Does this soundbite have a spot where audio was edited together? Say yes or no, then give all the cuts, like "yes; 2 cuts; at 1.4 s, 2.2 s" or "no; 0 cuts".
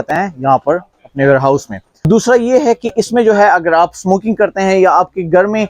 yes; 1 cut; at 2.1 s